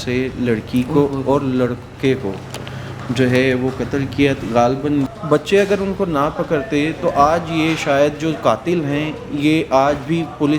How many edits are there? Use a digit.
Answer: 1